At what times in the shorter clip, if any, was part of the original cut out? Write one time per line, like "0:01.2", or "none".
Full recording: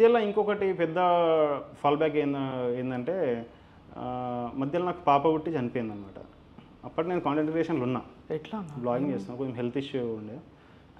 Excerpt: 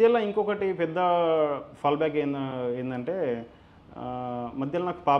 none